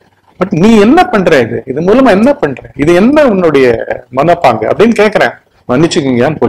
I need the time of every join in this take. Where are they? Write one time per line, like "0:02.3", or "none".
0:05.5